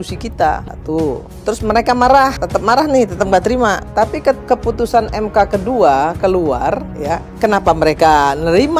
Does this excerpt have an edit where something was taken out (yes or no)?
yes